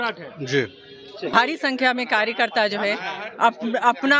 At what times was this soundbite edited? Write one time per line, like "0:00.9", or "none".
0:01.3